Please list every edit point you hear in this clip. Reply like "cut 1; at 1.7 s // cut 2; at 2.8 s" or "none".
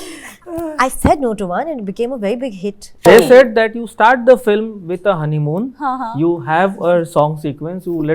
cut 1; at 3.1 s